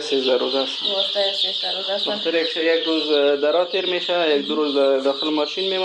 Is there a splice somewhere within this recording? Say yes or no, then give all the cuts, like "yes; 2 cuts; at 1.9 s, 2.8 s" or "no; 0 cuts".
no; 0 cuts